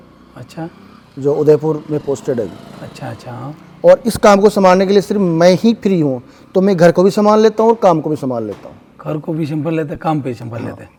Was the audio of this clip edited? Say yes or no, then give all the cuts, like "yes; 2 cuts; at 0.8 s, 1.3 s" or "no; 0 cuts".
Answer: no; 0 cuts